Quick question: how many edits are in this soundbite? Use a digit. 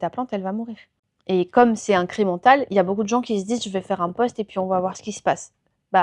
0